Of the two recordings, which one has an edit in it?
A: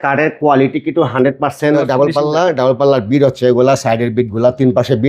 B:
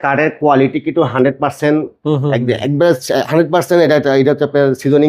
A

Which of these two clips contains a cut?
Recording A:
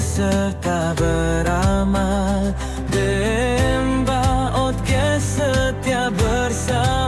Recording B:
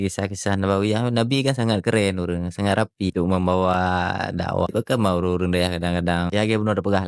B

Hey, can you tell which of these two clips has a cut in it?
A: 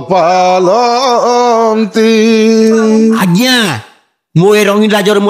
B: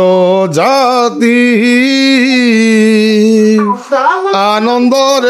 A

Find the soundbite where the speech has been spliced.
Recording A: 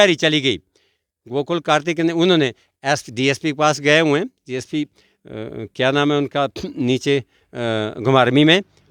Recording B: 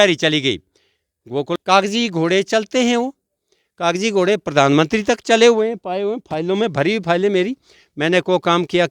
B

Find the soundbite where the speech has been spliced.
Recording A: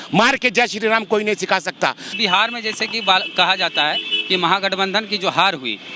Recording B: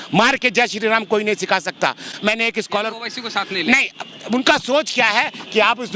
A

